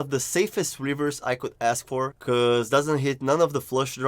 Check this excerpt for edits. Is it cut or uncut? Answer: cut